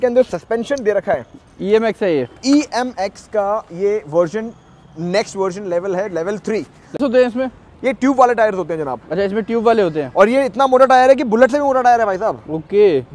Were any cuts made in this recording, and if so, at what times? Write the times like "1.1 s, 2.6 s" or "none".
7.0 s